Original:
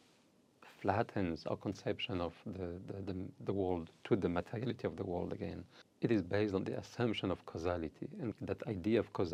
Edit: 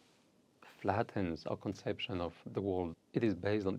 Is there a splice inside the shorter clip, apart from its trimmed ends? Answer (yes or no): yes